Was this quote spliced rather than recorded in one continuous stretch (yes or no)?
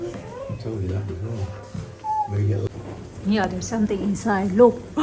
yes